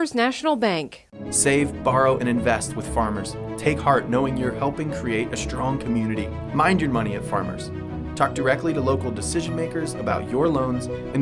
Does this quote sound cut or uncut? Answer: uncut